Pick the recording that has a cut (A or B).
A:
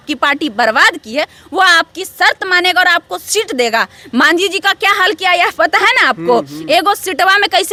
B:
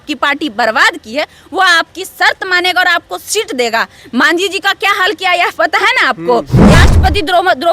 B